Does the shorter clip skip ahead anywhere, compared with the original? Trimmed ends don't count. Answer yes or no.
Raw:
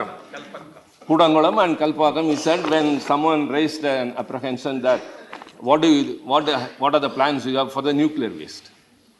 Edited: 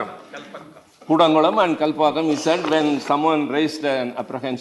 no